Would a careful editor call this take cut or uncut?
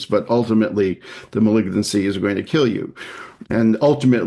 uncut